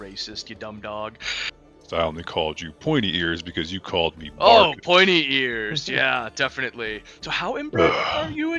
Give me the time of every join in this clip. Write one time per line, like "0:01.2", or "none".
0:01.8
0:07.1